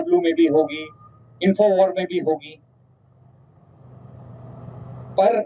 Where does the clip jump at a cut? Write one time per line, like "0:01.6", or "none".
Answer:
none